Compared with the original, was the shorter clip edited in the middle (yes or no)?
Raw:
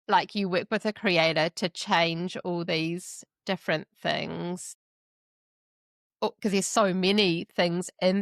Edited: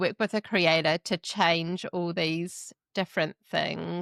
no